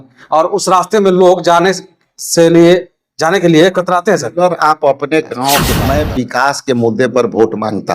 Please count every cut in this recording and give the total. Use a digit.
1